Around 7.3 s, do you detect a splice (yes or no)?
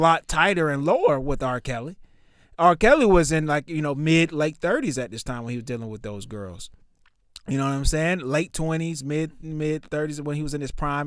no